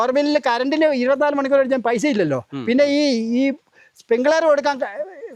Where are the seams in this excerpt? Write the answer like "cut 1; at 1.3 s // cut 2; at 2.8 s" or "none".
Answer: none